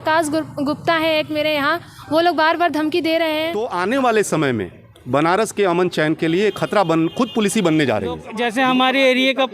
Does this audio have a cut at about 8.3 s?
yes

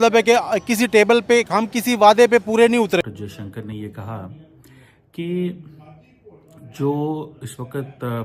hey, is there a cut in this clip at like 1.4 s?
no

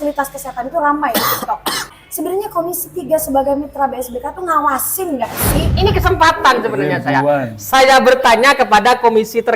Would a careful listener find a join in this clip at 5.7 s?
yes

